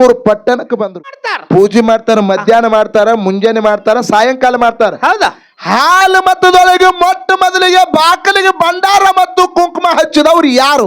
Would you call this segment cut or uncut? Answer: cut